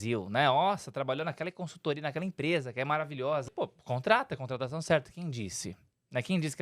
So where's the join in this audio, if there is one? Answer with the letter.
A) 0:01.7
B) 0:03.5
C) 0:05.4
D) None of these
B